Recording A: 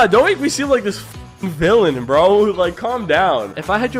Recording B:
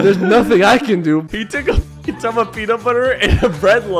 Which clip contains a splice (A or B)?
B